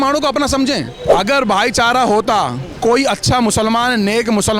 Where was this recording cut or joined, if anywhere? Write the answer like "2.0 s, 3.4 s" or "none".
1.0 s